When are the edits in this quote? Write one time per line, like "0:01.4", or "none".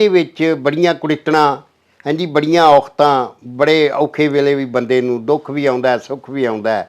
none